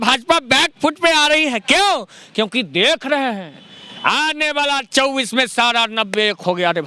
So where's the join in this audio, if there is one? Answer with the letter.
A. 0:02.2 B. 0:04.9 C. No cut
C